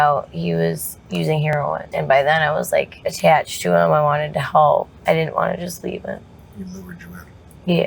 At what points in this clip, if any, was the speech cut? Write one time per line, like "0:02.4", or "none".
0:01.5
0:03.0
0:04.9
0:06.4

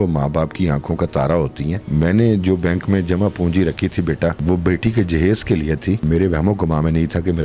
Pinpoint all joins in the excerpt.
0:01.9
0:04.4
0:06.0

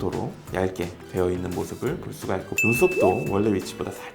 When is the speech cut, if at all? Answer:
0:02.5

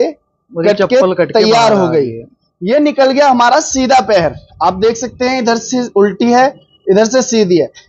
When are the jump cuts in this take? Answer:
none

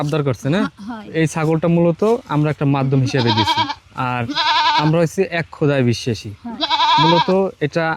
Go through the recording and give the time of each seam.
0:01.1

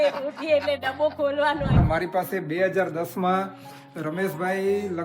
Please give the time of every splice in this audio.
0:01.8

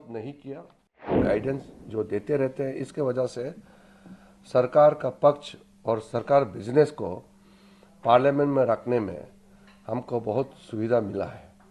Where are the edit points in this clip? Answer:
0:01.2

